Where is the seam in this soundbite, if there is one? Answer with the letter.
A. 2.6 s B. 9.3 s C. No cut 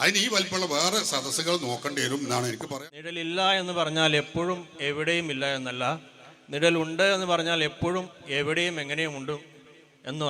A